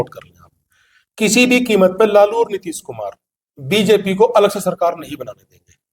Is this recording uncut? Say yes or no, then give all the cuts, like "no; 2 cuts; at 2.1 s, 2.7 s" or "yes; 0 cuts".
yes; 0 cuts